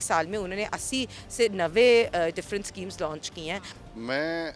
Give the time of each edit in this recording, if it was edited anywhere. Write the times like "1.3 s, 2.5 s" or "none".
none